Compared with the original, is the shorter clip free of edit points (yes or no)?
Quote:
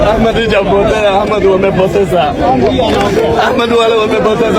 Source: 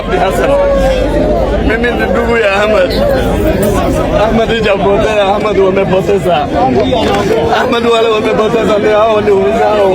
yes